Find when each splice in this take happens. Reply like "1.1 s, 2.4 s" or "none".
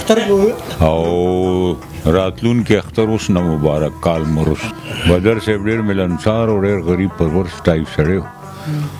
4.7 s